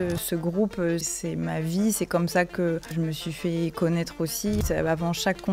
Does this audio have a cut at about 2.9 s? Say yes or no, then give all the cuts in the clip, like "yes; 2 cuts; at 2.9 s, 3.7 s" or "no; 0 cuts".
yes; 3 cuts; at 1.1 s, 2.9 s, 4.6 s